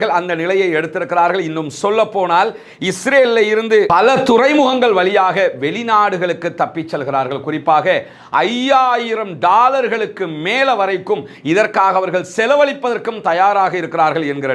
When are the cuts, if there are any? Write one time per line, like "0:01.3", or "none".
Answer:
none